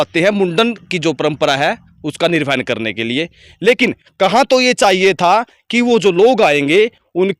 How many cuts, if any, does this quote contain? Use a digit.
0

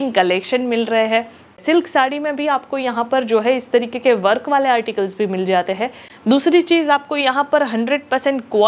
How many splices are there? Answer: 2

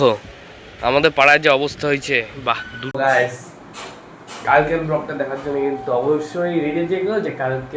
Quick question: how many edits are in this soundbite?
1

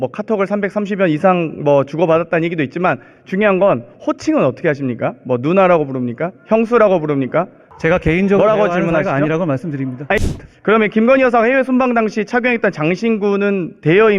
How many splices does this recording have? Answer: 2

